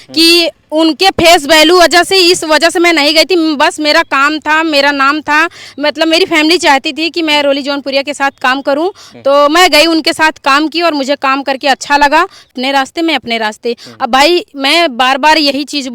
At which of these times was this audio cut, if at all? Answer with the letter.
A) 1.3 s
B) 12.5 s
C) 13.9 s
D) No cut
B